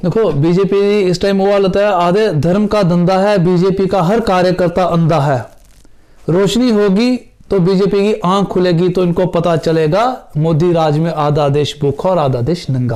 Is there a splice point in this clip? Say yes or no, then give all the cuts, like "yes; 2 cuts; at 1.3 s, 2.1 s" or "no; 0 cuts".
no; 0 cuts